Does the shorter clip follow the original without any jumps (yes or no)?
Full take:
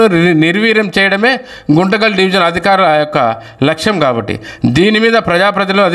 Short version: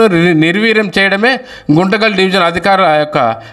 yes